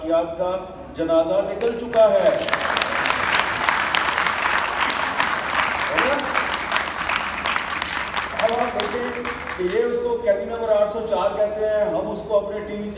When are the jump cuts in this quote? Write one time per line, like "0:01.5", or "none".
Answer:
none

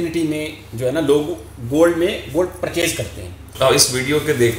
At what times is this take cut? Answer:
0:03.4

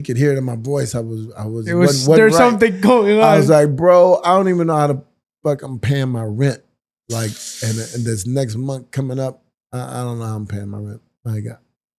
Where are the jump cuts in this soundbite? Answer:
none

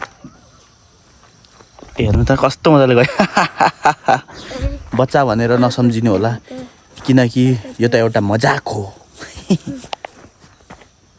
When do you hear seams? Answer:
none

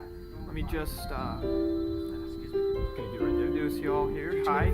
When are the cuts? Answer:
0:01.3

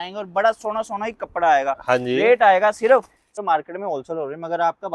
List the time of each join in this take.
0:03.4

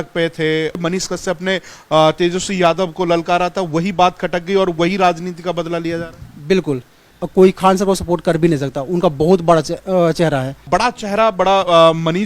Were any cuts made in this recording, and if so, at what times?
0:00.8
0:07.1
0:10.7

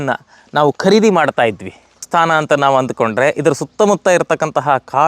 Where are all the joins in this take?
0:02.1

